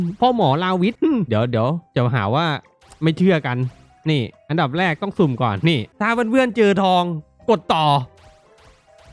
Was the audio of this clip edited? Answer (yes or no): yes